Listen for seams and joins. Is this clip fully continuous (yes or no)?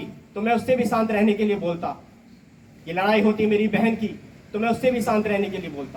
yes